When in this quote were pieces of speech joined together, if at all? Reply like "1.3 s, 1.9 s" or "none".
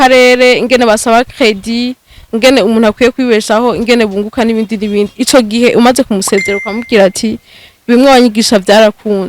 none